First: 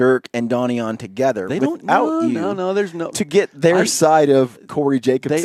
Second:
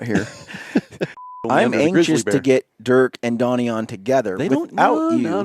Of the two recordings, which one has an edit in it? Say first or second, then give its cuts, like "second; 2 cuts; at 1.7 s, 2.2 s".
second; 1 cut; at 1.3 s